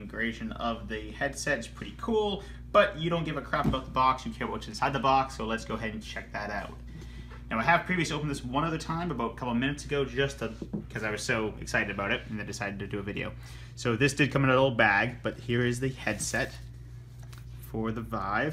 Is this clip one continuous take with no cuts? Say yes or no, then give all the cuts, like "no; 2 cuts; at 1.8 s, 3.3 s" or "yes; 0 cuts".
no; 1 cut; at 2.0 s